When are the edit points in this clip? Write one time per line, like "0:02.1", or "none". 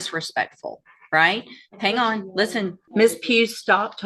0:02.8

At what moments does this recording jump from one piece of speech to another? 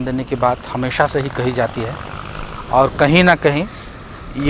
none

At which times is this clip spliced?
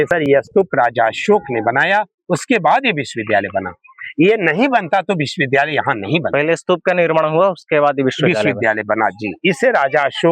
none

